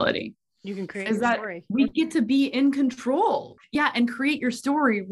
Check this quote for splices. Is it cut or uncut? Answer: cut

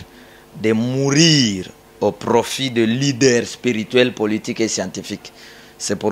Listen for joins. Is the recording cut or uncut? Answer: uncut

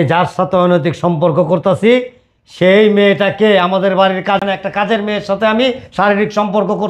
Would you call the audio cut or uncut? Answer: cut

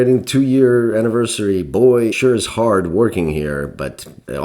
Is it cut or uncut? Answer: uncut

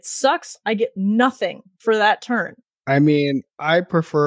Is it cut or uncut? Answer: cut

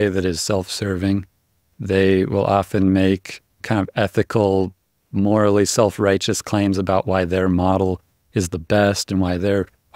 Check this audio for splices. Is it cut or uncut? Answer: uncut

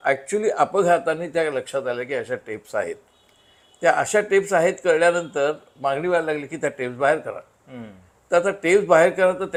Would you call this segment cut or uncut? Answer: uncut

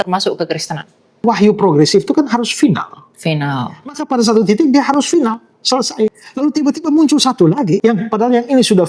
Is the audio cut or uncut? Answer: cut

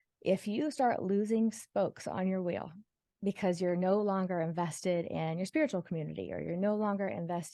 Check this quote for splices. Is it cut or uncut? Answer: uncut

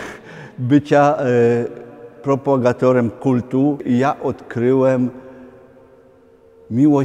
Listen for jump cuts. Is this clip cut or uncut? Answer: cut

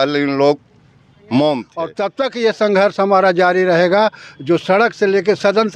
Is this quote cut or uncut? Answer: cut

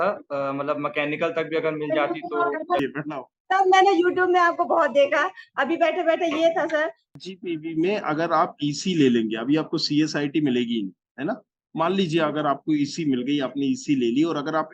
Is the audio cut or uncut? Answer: cut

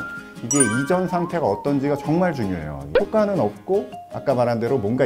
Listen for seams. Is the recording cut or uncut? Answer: cut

